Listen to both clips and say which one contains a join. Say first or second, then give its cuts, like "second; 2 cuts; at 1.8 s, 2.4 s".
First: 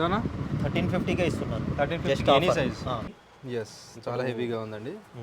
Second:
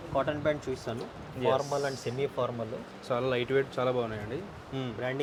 first; 1 cut; at 3.1 s